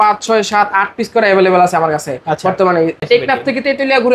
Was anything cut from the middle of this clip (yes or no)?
yes